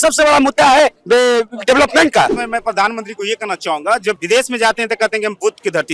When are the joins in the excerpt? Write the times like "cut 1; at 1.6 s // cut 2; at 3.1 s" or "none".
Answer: cut 1; at 2.4 s // cut 2; at 4.2 s